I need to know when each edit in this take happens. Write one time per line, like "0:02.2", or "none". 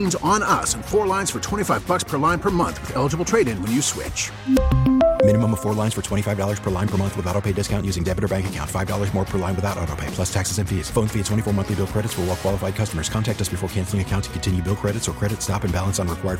none